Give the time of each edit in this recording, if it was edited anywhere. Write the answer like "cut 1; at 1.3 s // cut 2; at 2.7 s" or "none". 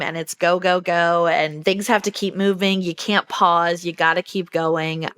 cut 1; at 1.5 s

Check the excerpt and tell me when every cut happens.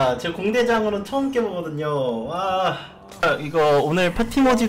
cut 1; at 3.2 s

